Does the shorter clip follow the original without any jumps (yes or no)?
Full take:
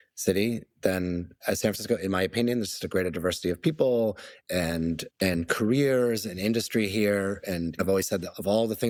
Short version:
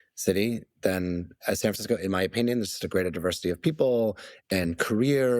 no